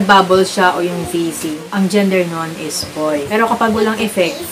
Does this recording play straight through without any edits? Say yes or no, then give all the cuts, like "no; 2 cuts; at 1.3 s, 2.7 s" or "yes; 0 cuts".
no; 2 cuts; at 1.6 s, 3.3 s